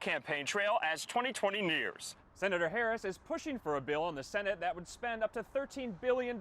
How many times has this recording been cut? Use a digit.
1